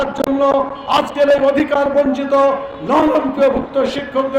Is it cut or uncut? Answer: uncut